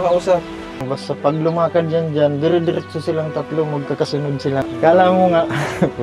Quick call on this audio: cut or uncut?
cut